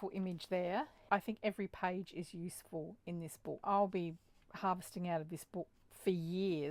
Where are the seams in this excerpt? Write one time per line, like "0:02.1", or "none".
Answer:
0:01.0
0:03.6